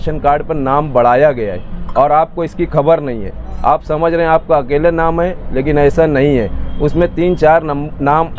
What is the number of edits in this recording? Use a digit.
0